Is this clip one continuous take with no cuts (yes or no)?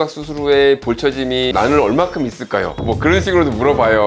yes